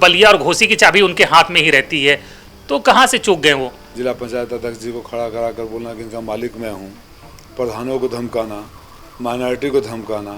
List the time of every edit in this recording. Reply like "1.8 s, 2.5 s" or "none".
3.8 s